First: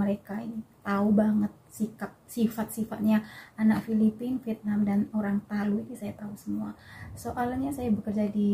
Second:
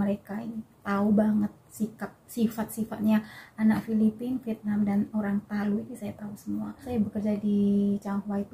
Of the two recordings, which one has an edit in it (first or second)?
second